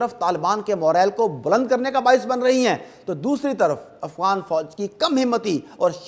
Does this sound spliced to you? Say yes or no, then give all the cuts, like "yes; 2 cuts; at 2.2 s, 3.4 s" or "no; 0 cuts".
no; 0 cuts